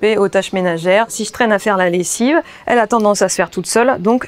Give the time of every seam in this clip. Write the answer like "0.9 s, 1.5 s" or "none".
1.1 s